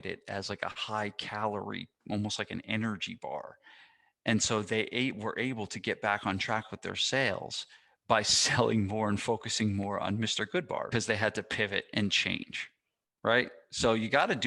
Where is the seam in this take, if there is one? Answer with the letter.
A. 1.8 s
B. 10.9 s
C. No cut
B